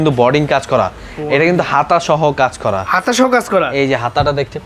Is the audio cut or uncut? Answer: uncut